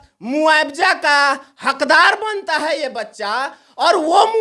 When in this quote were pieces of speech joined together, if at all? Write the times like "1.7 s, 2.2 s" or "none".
none